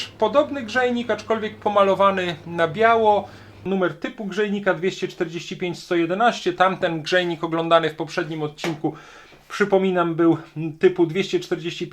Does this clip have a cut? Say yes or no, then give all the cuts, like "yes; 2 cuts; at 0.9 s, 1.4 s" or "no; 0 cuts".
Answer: yes; 1 cut; at 3.7 s